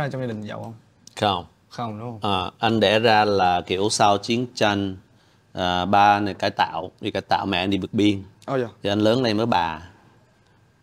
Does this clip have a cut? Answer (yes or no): no